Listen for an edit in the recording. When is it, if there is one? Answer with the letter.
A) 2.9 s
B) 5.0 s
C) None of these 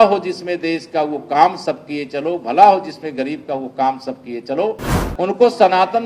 B